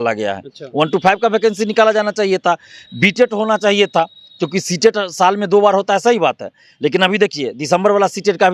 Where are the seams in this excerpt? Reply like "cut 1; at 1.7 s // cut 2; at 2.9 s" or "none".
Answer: none